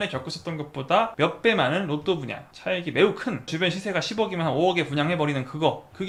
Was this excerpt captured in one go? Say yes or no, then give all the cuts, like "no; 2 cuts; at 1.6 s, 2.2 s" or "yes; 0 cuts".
yes; 0 cuts